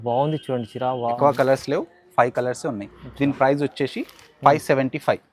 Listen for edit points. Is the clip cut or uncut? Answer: cut